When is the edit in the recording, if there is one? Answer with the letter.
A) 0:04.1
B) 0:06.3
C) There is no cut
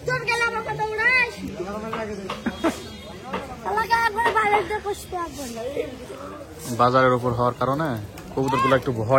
B